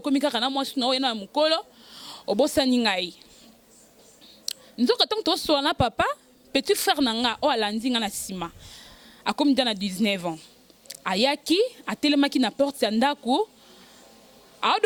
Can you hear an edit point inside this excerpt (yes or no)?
no